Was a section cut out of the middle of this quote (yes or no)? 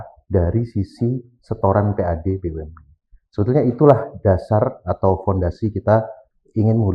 no